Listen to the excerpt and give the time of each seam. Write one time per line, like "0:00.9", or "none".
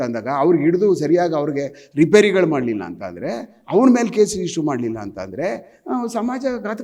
none